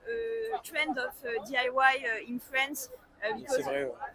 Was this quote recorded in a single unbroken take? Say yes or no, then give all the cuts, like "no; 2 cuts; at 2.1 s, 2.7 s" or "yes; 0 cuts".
yes; 0 cuts